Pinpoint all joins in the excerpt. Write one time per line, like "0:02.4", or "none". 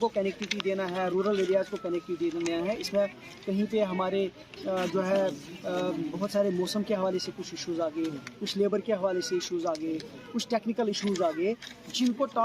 none

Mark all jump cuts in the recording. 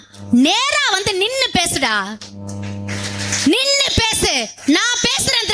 none

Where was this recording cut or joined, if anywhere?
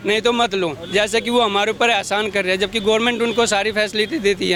none

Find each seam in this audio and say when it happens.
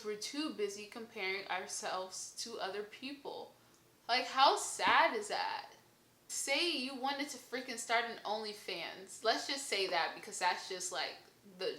0:06.3

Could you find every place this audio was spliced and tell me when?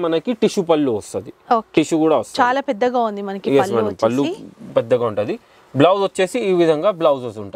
none

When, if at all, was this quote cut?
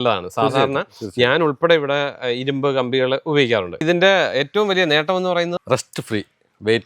0:03.8
0:05.6

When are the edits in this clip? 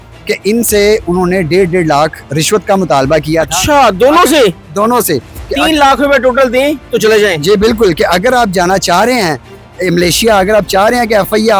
none

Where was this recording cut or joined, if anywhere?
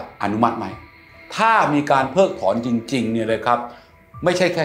0:01.1

